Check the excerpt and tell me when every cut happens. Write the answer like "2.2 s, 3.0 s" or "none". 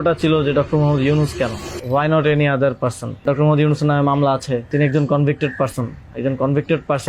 1.7 s, 3.2 s, 4.7 s